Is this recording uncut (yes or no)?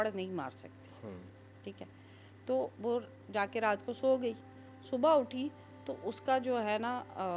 yes